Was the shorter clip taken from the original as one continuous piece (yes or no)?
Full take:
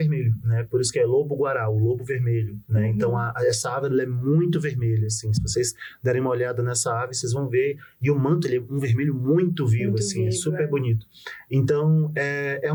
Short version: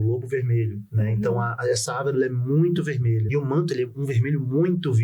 no